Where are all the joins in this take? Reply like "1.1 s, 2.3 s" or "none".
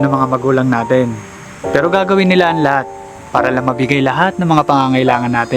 none